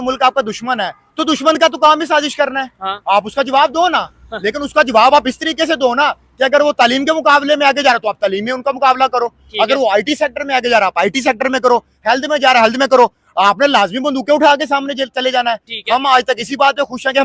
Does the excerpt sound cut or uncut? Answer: uncut